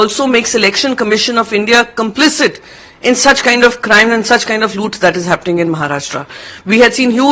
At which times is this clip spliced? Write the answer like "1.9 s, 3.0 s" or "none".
none